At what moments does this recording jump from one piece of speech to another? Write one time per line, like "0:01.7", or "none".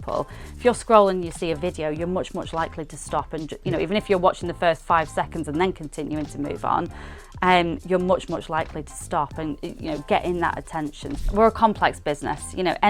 0:11.1